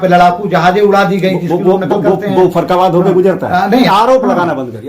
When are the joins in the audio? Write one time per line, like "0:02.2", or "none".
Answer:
0:03.9